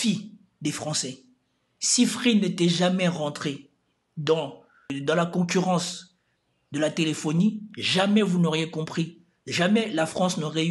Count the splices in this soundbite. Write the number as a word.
zero